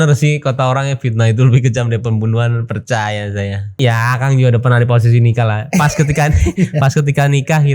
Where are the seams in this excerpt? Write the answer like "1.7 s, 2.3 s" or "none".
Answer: 3.8 s

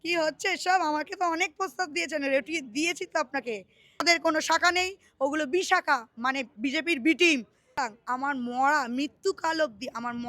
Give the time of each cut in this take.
4.0 s, 7.8 s

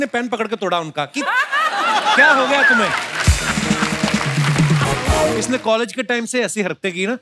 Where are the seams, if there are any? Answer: 5.4 s

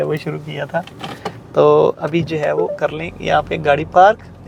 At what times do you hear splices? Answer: none

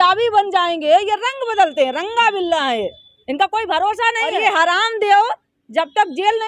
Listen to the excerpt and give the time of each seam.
4.3 s

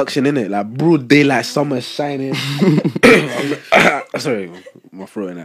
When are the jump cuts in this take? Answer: none

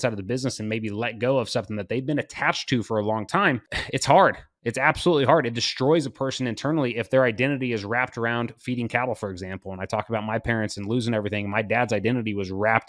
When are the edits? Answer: none

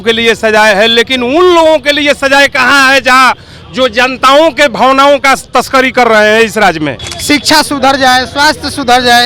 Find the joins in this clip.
7.1 s

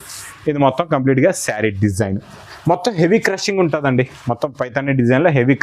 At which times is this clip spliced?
none

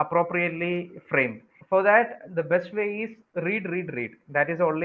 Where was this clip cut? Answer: 1.5 s

